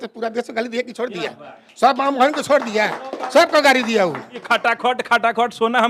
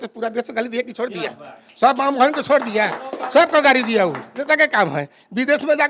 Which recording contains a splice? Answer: first; 1 cut; at 4.3 s

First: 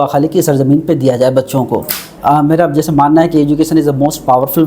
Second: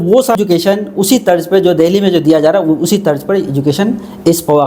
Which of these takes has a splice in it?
first; 1 cut; at 2.1 s

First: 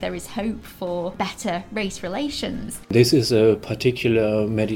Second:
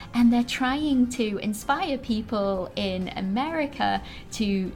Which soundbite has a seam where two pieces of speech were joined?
first; 2 cuts; at 1.2 s, 2.7 s

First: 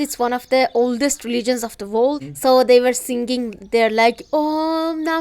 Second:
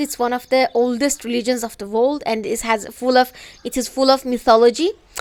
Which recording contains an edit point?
first; 1 cut; at 2.2 s

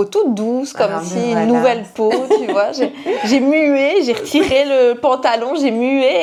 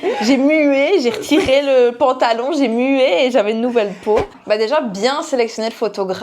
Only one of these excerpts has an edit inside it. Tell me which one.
second; 1 cut; at 4.3 s

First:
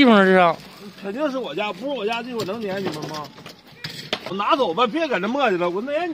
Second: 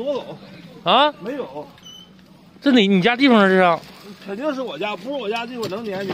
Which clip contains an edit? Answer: first; 1 cut; at 4.4 s

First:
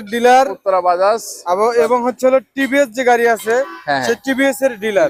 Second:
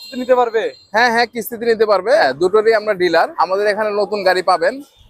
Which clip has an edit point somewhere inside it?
second; 2 cuts; at 2.2 s, 3.3 s

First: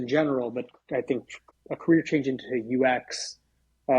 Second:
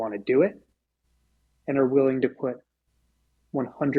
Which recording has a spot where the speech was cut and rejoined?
first; 1 cut; at 1.4 s

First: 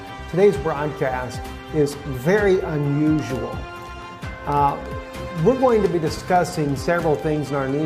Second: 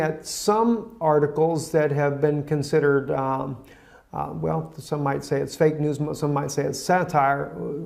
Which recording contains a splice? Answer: first; 1 cut; at 1.2 s

